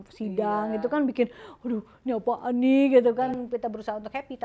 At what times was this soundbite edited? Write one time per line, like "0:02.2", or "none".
0:03.3